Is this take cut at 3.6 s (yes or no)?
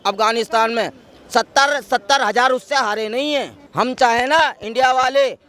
yes